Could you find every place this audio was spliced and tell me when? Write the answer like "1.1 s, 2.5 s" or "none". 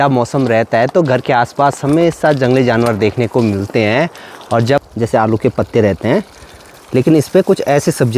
4.8 s